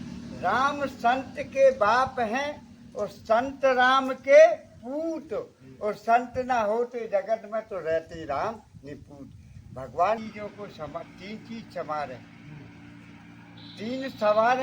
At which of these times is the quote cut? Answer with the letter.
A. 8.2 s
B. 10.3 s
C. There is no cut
B